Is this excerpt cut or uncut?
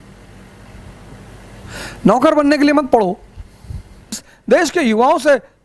cut